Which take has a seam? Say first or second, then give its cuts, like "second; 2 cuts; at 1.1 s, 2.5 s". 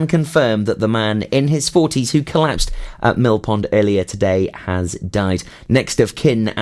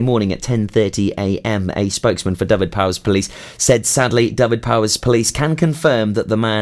first; 1 cut; at 5.5 s